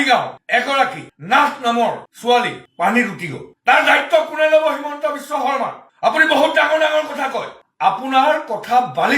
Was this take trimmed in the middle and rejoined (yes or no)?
no